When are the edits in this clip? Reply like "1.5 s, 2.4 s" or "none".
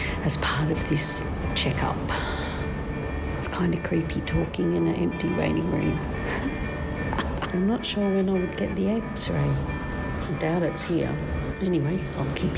2.6 s, 7.5 s, 9.9 s, 11.5 s